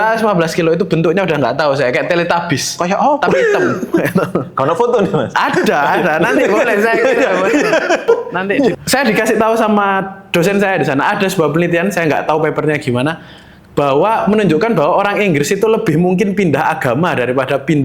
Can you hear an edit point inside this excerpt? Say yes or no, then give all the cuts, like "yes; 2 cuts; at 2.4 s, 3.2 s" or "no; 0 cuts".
yes; 1 cut; at 8.8 s